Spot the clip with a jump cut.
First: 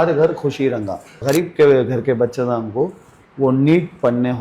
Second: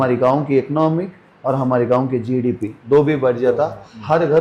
first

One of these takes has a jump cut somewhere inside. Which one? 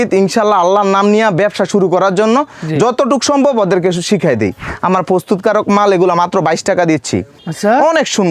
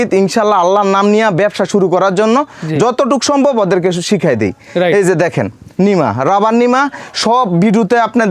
first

